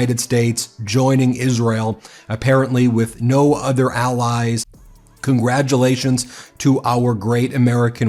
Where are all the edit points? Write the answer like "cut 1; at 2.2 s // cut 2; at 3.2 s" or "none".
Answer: cut 1; at 4.7 s